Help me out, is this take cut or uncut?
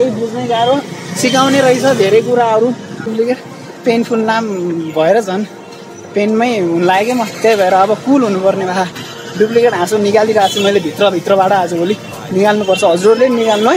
cut